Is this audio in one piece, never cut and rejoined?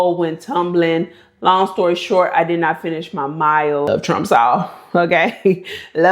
no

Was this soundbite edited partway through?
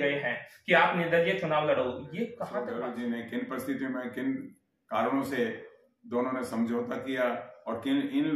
yes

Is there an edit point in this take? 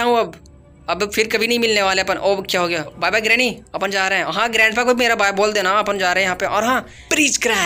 yes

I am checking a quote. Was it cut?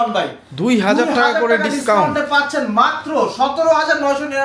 no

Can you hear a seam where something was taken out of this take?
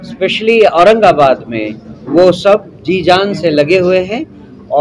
no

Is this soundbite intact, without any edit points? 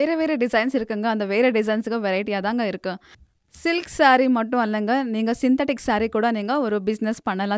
yes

